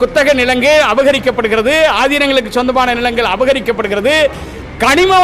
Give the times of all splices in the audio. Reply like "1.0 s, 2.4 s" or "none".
none